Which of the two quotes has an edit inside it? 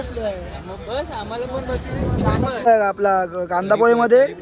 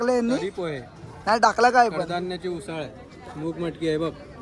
first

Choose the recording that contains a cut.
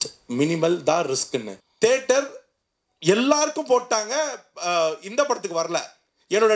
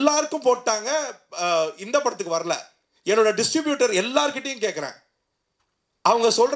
first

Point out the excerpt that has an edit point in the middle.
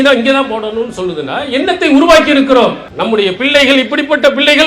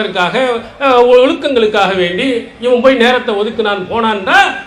first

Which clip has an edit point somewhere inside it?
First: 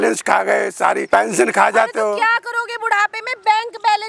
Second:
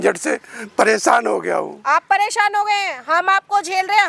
first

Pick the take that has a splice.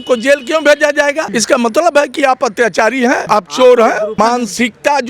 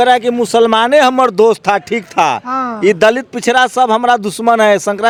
first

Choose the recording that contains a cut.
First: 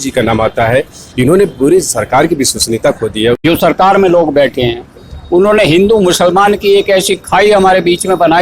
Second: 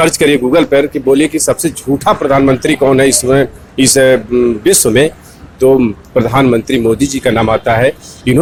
first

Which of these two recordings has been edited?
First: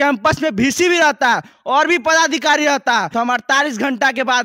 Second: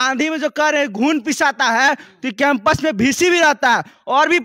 first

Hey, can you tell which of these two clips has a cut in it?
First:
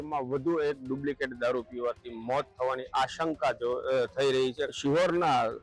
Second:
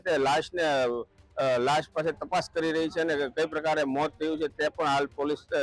first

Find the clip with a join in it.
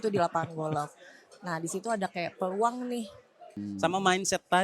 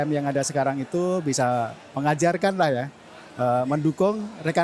first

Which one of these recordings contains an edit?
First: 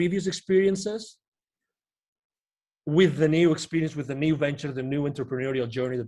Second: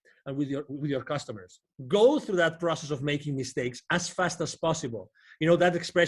second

